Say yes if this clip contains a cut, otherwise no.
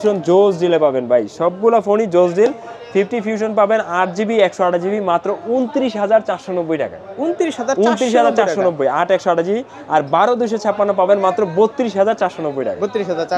no